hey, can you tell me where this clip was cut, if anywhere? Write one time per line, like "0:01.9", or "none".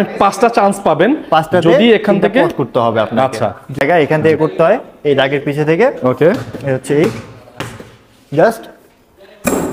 0:03.8

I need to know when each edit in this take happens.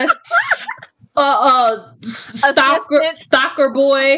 none

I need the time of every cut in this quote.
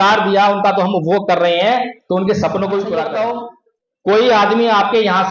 0:03.1

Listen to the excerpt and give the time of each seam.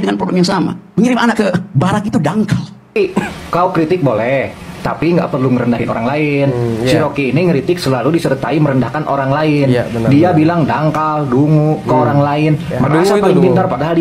0:02.8

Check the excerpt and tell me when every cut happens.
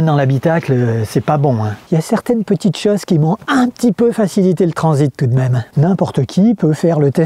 0:01.7
0:05.6

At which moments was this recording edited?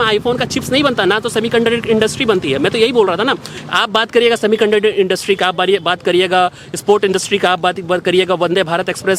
none

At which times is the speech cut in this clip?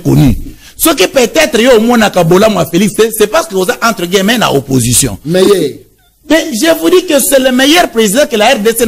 none

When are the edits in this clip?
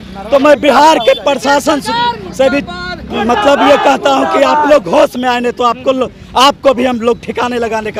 none

